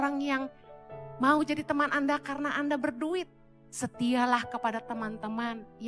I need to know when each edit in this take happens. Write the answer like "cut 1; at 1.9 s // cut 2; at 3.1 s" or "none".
none